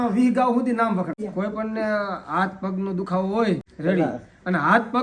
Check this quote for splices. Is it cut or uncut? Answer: cut